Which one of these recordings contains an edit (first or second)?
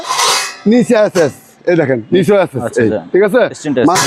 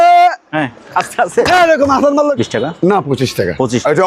second